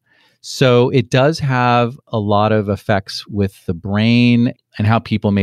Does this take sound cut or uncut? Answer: uncut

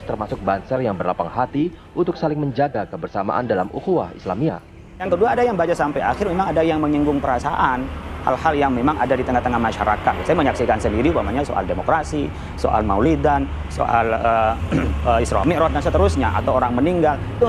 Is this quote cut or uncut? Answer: cut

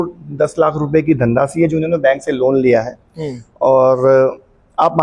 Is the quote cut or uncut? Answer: uncut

